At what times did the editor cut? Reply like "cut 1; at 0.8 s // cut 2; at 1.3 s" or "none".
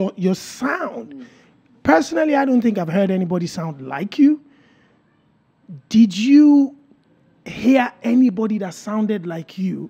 none